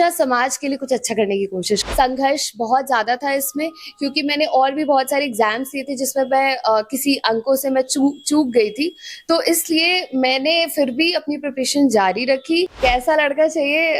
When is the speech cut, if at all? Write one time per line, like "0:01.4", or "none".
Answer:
0:01.8
0:12.7